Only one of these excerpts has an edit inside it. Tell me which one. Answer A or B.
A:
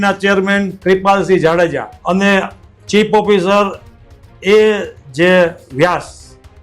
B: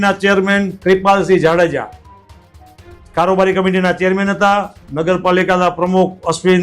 A